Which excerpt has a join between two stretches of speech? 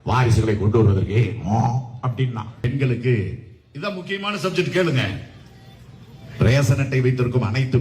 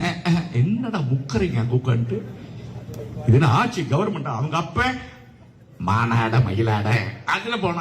first; 1 cut; at 2.7 s

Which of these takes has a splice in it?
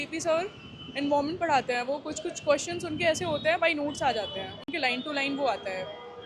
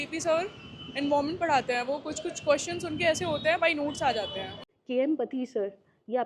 second; 1 cut; at 4.7 s

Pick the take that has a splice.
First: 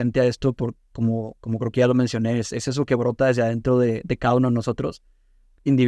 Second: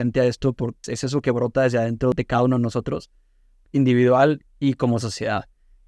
second; 2 cuts; at 0.9 s, 2.1 s

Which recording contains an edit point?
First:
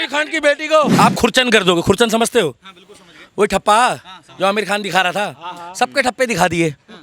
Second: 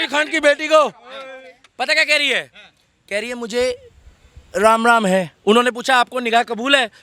first; 1 cut; at 0.9 s

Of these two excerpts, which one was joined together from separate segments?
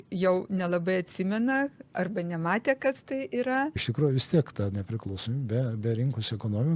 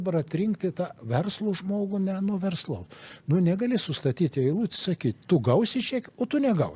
first; 1 cut; at 3.8 s

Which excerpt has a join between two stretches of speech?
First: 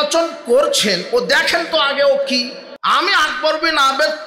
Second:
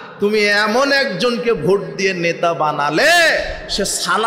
first; 1 cut; at 2.6 s

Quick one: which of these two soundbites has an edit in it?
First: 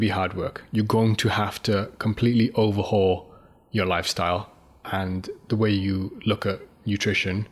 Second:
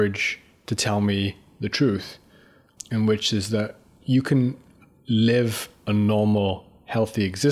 second; 1 cut; at 2.7 s

